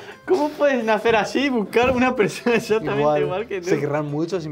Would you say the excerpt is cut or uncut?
uncut